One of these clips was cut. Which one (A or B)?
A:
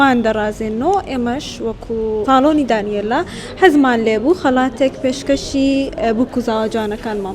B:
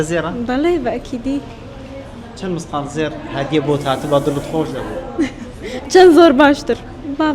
A